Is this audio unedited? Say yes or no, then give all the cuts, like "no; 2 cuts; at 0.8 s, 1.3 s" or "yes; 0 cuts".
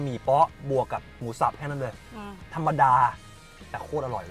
no; 1 cut; at 2.1 s